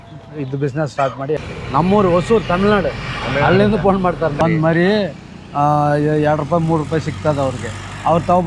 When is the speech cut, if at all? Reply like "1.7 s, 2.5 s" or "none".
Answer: 1.4 s, 4.4 s

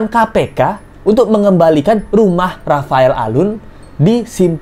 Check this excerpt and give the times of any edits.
none

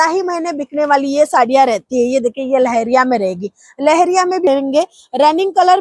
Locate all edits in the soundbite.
4.5 s

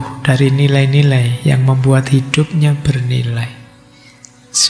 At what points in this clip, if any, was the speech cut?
none

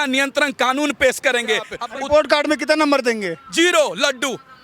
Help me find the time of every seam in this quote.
1.8 s

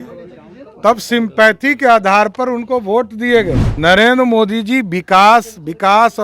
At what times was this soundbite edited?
3.7 s

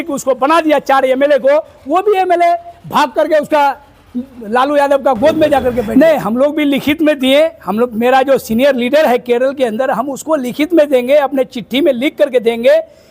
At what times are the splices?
5.9 s

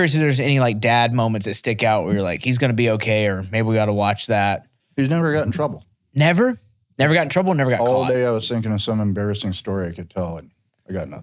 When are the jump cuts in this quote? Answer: 4.8 s

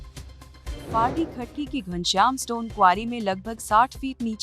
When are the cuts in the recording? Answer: 0.9 s

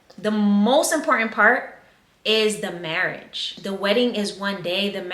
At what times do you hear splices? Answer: 3.5 s

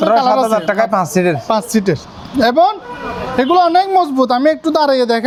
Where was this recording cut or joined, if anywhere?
none

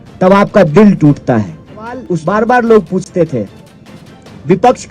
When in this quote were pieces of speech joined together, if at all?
2.1 s

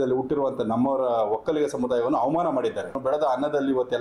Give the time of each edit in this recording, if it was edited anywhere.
3.0 s

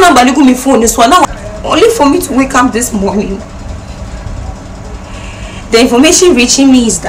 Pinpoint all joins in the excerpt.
1.2 s

